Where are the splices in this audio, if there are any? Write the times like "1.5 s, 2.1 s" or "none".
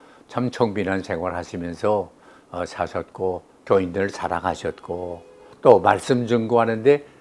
5.5 s

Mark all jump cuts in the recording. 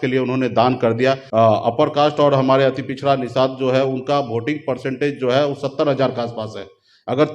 1.2 s

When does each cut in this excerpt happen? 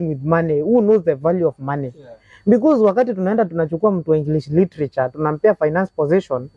none

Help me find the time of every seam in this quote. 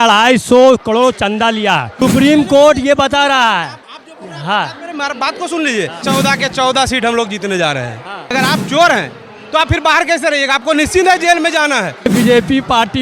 1.9 s, 6.0 s, 8.3 s, 12.1 s

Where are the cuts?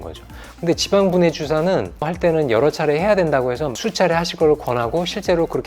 2.1 s

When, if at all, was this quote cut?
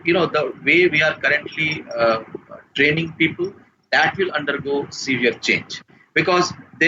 none

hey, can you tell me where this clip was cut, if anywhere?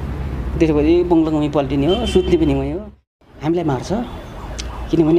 3.1 s

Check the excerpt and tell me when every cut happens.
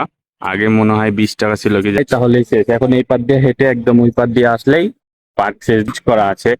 2.0 s, 5.9 s

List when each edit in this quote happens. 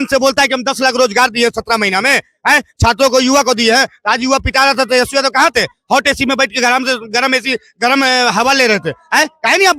none

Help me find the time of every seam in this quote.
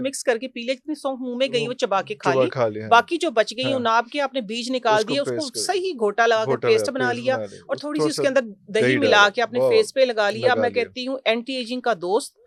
none

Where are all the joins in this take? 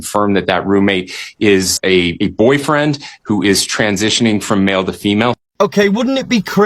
1.7 s, 5.4 s

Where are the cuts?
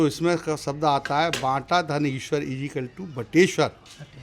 none

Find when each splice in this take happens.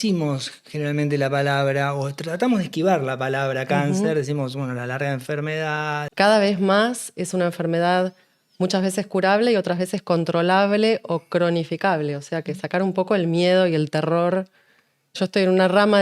6.0 s, 15.2 s

